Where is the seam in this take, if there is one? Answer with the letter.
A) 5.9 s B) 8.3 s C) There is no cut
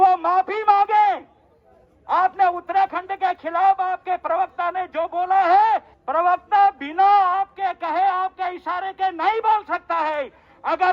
A